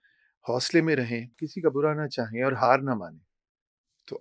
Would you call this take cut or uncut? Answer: cut